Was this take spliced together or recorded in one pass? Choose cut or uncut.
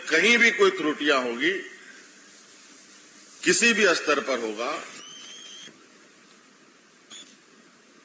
uncut